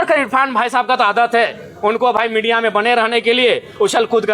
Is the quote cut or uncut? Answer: uncut